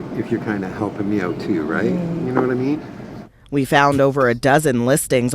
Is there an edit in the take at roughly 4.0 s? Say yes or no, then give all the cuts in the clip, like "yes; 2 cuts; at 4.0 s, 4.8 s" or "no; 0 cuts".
yes; 1 cut; at 4.0 s